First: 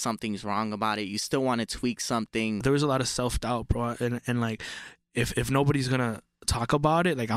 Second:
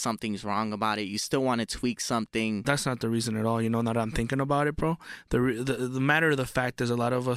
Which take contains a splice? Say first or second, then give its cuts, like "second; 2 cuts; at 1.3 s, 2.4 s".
first; 1 cut; at 2.6 s